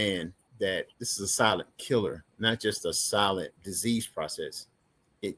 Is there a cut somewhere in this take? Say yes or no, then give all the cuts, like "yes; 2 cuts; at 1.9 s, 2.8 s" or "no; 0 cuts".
yes; 3 cuts; at 1.0 s, 2.3 s, 3.6 s